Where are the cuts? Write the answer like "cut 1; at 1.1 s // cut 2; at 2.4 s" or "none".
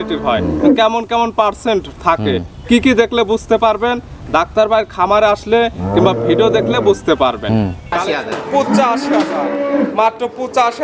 cut 1; at 7.9 s